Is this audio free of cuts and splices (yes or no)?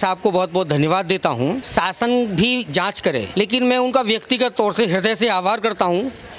no